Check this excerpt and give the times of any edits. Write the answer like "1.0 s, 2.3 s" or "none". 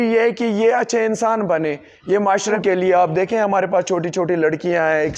2.6 s